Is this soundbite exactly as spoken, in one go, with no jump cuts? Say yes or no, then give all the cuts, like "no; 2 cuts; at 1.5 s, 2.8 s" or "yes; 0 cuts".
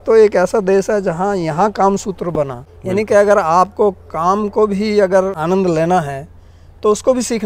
no; 2 cuts; at 2.6 s, 5.4 s